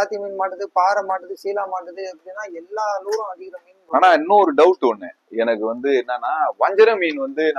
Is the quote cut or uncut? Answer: uncut